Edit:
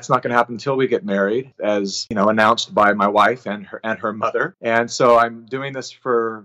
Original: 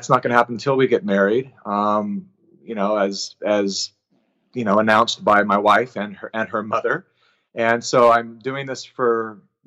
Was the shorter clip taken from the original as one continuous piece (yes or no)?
no